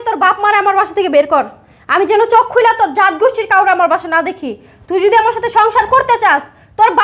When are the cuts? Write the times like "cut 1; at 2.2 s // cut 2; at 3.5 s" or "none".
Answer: none